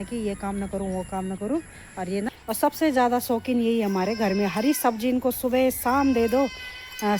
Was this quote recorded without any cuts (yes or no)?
no